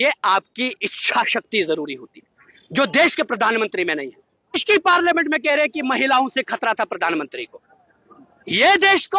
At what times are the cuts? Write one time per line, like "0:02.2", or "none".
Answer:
0:04.6